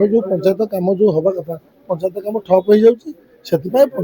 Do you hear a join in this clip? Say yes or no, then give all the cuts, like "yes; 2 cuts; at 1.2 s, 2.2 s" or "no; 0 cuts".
no; 0 cuts